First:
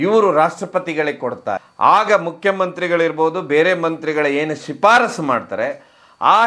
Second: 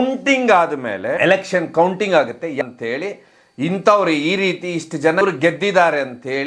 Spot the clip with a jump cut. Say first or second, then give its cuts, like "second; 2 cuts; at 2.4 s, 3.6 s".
first; 1 cut; at 1.6 s